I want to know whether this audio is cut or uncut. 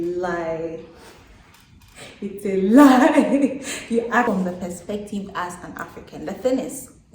cut